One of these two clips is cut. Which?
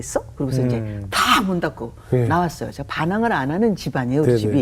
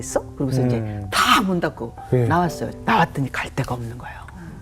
second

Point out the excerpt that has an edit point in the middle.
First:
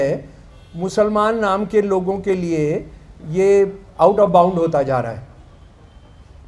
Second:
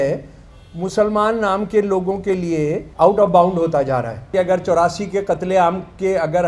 second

